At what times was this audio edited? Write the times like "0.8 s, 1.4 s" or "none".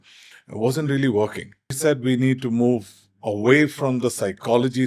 1.8 s